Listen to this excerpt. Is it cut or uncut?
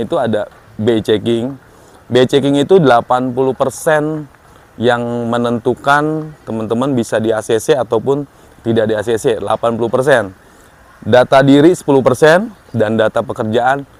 uncut